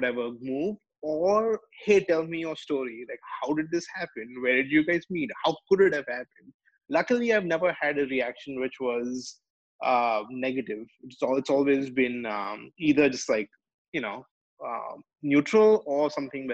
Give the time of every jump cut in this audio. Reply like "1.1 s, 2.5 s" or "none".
none